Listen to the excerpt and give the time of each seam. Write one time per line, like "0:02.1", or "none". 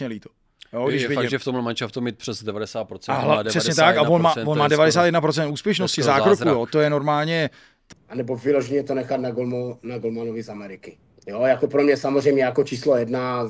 0:07.9